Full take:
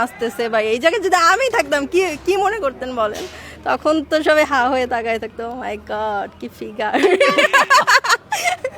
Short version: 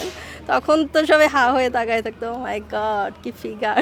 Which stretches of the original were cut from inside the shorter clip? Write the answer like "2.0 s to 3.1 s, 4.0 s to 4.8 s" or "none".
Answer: none